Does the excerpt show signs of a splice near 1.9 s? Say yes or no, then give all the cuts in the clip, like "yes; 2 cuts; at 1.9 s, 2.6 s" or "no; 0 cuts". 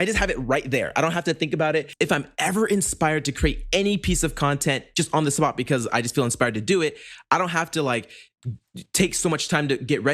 yes; 1 cut; at 1.9 s